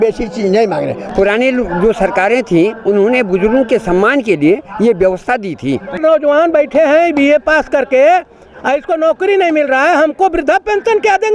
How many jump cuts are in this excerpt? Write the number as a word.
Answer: two